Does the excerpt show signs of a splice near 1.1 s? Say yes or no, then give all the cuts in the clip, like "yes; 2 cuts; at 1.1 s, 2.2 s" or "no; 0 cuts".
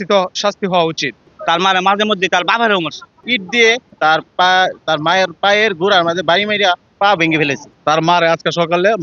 yes; 3 cuts; at 1.1 s, 3.2 s, 7.7 s